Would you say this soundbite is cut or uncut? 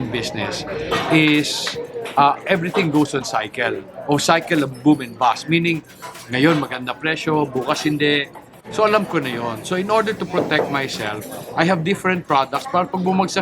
uncut